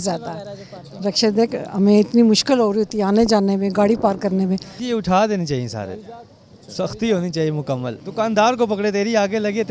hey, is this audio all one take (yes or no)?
no